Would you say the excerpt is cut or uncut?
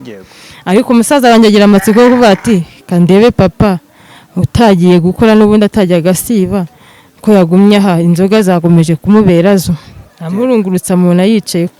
uncut